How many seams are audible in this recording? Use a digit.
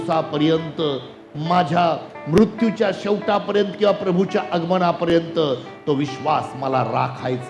0